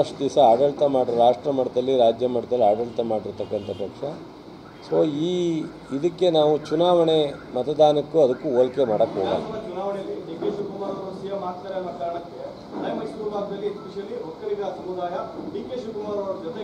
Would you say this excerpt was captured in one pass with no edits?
yes; 0 cuts

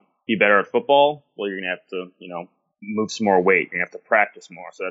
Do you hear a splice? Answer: no; 0 cuts

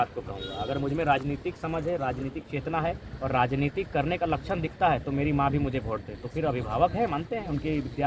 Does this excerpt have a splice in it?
no; 0 cuts

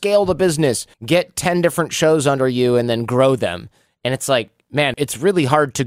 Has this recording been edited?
yes; 2 cuts; at 0.9 s, 4.9 s

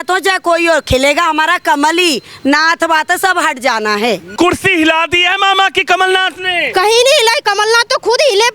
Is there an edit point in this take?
yes; 1 cut; at 4.3 s

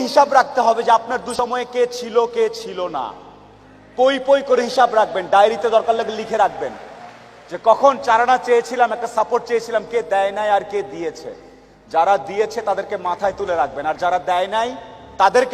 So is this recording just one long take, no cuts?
no; 1 cut; at 1.3 s

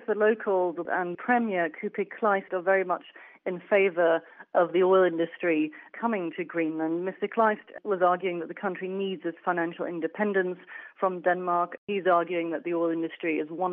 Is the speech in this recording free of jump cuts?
no; 3 cuts; at 1.2 s, 2.5 s, 11.9 s

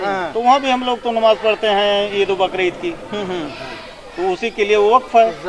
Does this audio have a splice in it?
no; 0 cuts

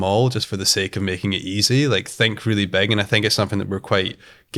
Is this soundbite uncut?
yes; 0 cuts

